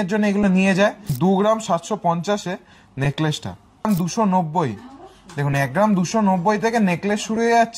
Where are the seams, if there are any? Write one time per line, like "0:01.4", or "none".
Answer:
0:01.1
0:03.9